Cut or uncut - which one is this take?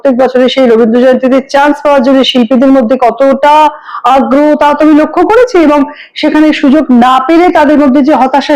uncut